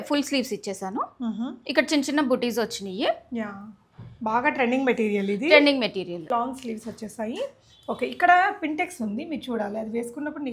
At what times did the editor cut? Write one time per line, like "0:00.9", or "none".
0:06.2